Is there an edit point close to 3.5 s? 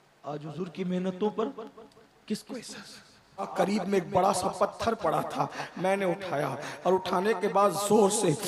yes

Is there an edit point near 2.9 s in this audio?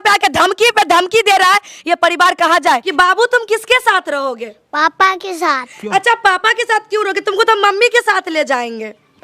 yes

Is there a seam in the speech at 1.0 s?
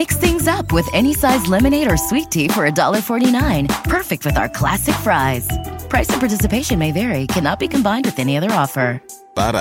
no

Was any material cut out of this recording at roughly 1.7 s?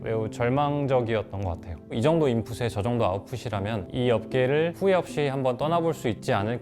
yes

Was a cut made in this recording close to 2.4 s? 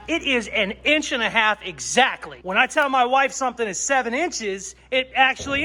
yes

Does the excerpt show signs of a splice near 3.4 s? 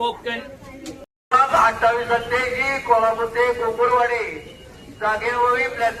no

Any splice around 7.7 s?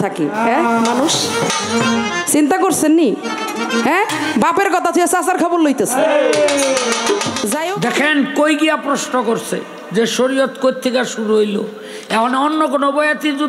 yes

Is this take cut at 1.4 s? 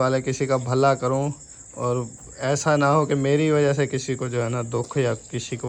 no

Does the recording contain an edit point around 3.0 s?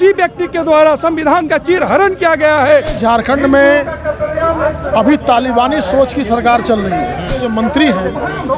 yes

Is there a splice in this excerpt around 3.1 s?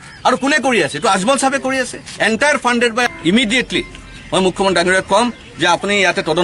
yes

